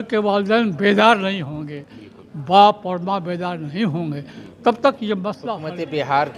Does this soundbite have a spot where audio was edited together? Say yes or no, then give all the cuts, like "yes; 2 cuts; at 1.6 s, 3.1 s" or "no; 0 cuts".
yes; 1 cut; at 5.5 s